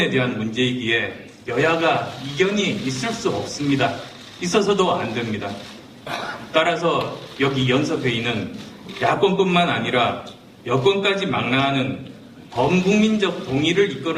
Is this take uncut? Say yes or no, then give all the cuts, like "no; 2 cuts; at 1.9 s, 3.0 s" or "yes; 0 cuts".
yes; 0 cuts